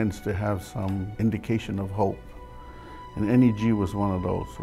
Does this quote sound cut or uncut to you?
cut